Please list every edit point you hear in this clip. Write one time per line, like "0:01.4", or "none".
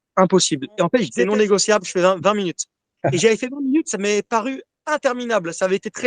0:01.1
0:04.7